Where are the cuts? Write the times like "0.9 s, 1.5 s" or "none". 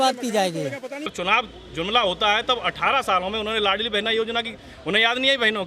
1.1 s